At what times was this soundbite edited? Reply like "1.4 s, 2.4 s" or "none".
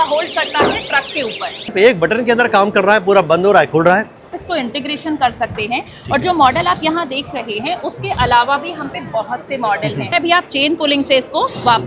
1.7 s, 4.4 s, 10.1 s